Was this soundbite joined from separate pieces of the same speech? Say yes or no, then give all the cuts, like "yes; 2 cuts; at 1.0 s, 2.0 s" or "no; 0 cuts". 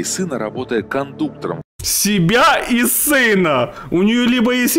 no; 0 cuts